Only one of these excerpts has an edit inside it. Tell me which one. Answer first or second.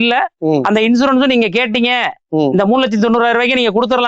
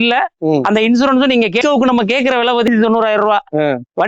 second